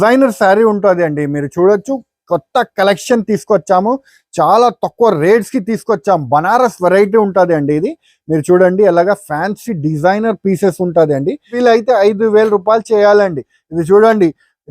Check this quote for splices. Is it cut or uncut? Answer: cut